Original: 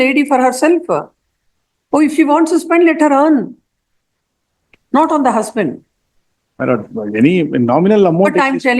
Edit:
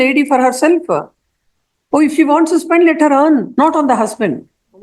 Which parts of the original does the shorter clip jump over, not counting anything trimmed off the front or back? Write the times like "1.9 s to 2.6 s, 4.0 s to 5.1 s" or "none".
3.5 s to 4.8 s